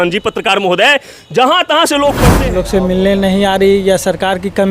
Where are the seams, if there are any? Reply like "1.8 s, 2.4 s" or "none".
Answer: 2.3 s